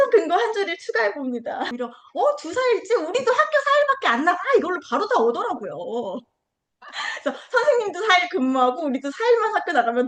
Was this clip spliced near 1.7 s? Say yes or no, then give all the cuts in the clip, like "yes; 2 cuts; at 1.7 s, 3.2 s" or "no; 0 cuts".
yes; 1 cut; at 1.7 s